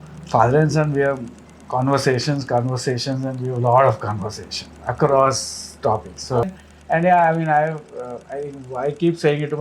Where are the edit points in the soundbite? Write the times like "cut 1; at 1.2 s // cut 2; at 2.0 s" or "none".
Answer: cut 1; at 6.4 s